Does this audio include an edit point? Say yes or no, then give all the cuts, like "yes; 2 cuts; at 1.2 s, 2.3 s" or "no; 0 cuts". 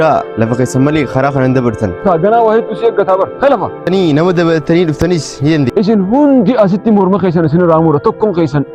yes; 3 cuts; at 2.0 s, 3.9 s, 5.7 s